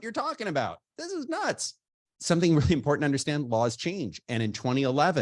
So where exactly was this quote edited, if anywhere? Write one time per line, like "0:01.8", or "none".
0:02.1